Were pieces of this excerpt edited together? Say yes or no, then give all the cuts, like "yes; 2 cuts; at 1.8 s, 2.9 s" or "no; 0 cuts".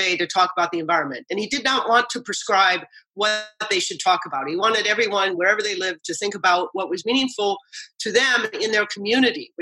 no; 0 cuts